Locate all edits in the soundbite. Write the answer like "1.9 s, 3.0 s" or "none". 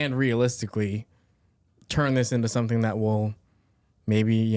none